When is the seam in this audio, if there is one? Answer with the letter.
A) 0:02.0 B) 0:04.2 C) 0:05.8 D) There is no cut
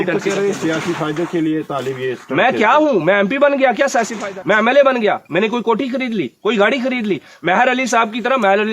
B